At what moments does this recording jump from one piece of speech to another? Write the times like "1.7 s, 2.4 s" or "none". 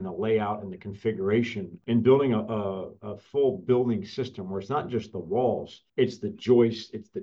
1.7 s, 5.8 s